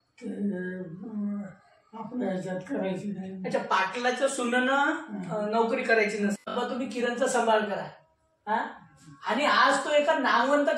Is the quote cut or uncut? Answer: cut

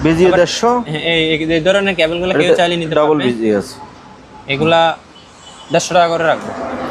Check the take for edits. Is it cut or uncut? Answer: uncut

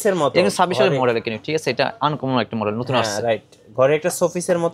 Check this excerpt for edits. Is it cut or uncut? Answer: uncut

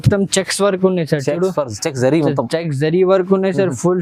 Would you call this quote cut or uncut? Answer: uncut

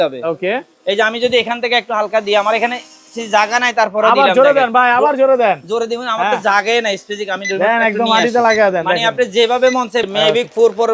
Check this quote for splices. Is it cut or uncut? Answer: cut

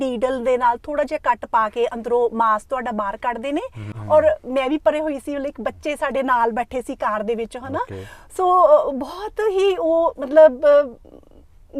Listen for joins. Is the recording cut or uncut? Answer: cut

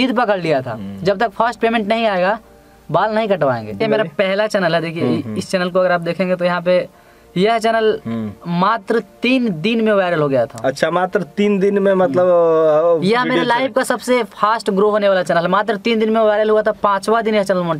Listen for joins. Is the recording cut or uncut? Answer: cut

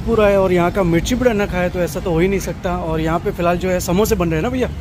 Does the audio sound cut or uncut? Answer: uncut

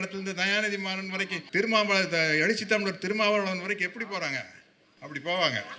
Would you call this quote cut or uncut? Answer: cut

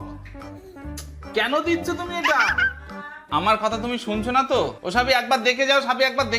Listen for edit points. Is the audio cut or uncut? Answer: cut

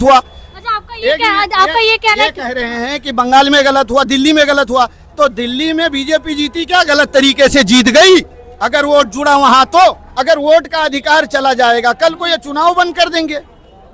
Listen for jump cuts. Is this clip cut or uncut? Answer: cut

